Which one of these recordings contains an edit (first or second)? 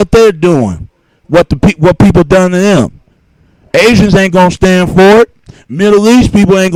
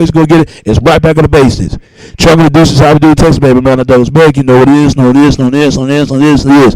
second